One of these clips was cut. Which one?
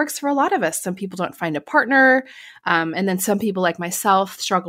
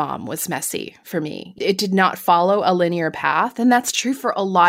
second; 1 cut; at 1.5 s

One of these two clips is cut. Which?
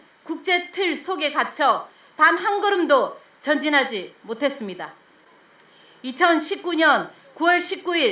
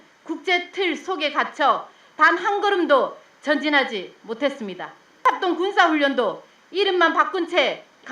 second; 1 cut; at 5.2 s

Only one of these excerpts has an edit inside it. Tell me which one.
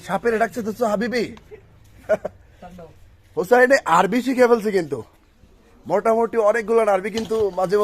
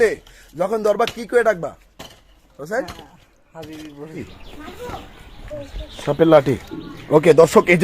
second; 1 cut; at 4.4 s

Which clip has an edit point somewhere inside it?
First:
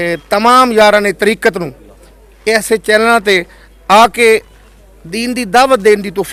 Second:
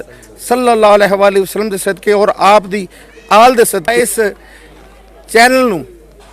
second; 1 cut; at 3.9 s

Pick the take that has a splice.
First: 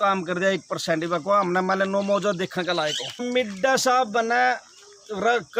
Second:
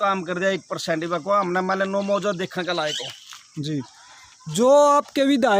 first; 1 cut; at 3.2 s

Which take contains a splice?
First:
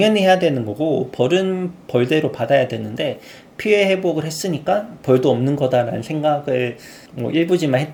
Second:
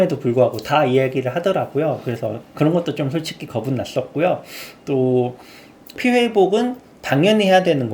second; 1 cut; at 5.9 s

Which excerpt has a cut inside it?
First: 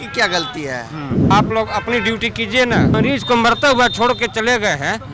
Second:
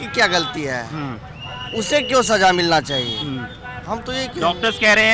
first; 2 cuts; at 1.3 s, 3.0 s

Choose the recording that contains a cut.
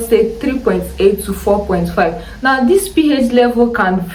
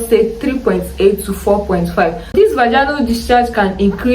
second; 1 cut; at 2.3 s

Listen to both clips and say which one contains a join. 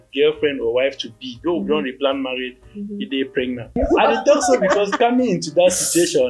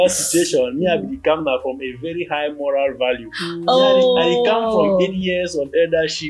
first; 1 cut; at 3.8 s

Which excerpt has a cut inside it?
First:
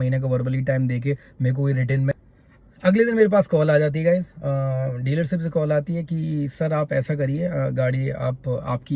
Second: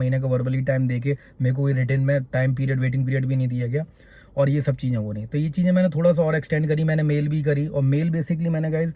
first; 1 cut; at 2.1 s

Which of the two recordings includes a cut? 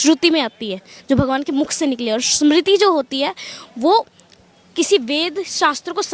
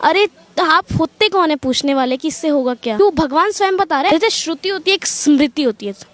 second; 2 cuts; at 3.0 s, 4.1 s

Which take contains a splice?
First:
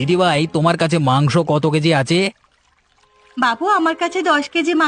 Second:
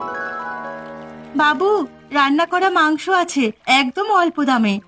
second; 1 cut; at 1.1 s

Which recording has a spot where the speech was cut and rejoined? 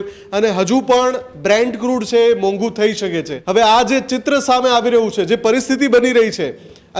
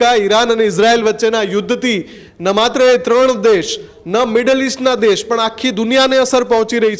first; 1 cut; at 3.3 s

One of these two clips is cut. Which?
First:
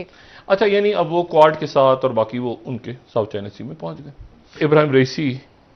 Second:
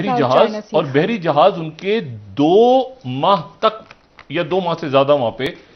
first; 1 cut; at 4.6 s

